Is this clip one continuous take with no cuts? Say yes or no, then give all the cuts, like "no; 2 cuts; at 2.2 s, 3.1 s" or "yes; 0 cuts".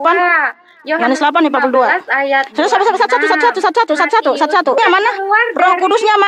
no; 1 cut; at 4.8 s